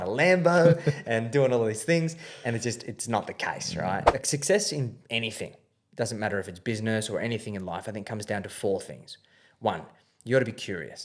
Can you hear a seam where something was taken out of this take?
yes; 1 cut; at 4.1 s

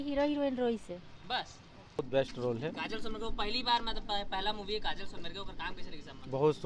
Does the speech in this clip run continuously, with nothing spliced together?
no; 1 cut; at 2.0 s

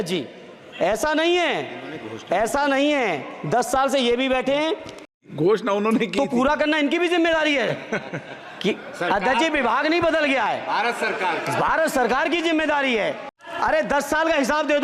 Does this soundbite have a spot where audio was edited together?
yes; 2 cuts; at 5.2 s, 13.3 s

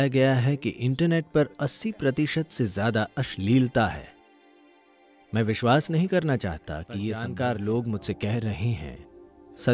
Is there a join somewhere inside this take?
yes; 1 cut; at 7.3 s

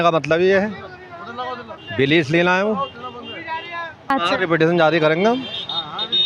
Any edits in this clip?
yes; 1 cut; at 4.1 s

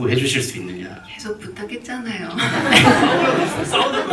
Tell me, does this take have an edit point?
no; 0 cuts

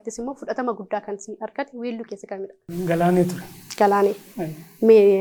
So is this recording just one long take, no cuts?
yes; 0 cuts

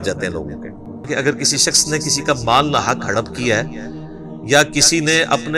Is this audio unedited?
no; 1 cut; at 1.1 s

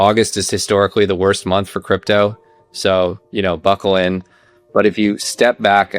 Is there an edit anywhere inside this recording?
yes; 1 cut; at 2.6 s

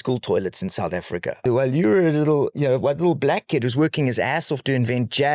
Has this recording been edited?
yes; 1 cut; at 1.4 s

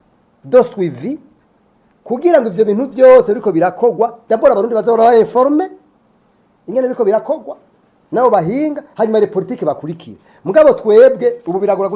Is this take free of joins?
yes; 0 cuts

